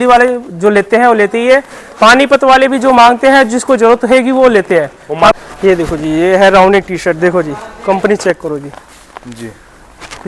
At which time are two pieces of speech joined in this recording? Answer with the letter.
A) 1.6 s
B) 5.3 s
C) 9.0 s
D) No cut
B